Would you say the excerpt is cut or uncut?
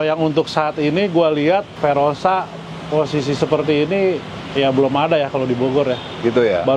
cut